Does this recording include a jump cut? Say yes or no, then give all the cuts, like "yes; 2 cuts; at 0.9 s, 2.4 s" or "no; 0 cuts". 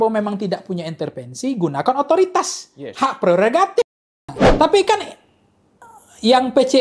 yes; 1 cut; at 4.4 s